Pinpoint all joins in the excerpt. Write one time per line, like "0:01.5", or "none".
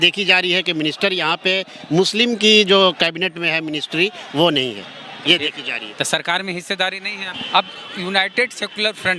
0:07.3